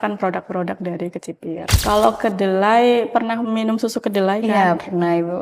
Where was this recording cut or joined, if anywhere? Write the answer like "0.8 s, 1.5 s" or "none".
1.7 s